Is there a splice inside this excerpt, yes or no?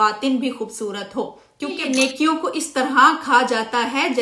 yes